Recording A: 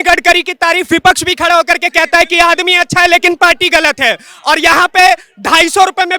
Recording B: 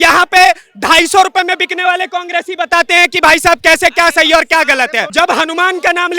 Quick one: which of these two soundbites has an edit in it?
B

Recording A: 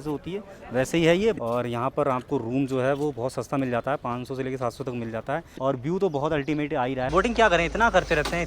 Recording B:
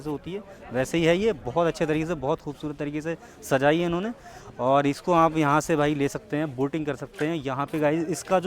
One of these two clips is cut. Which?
A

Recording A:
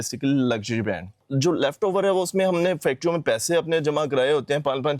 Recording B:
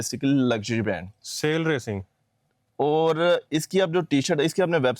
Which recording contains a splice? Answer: A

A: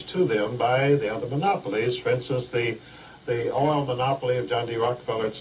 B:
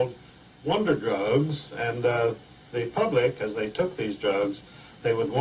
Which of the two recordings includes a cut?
A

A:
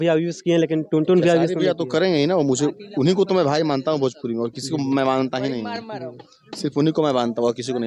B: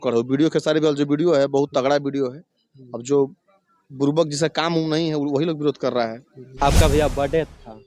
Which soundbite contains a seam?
B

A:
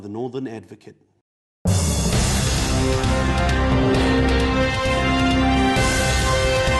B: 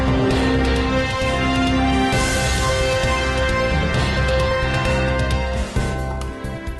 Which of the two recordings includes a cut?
A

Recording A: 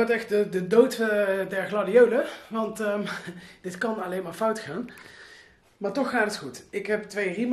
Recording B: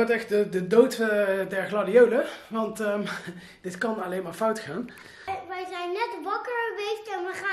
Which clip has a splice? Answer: B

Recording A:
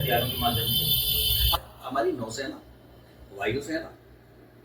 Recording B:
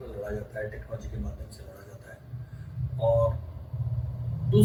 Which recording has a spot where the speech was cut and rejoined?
A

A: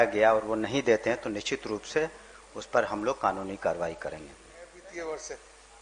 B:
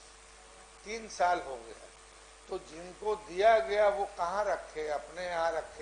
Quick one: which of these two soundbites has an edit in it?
A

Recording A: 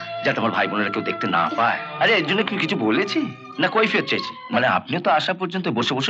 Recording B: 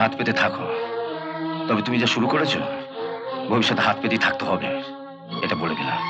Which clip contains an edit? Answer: A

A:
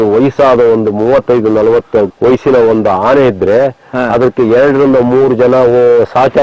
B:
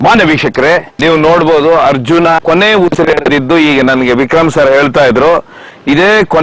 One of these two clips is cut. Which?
B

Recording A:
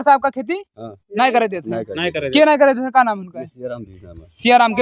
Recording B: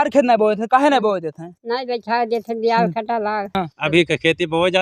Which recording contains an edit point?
B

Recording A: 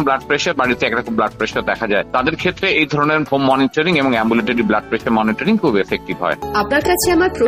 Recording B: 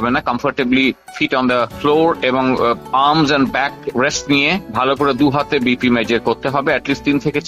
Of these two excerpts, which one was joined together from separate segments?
A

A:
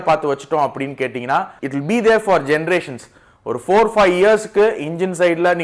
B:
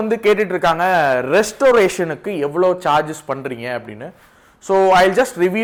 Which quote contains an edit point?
A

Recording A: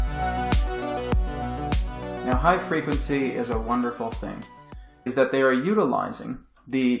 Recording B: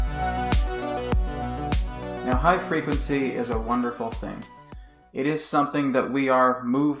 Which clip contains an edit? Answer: B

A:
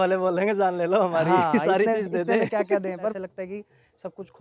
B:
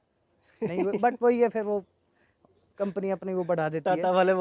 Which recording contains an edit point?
A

